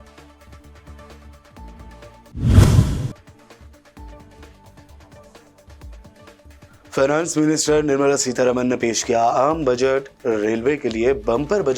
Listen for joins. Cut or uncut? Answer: uncut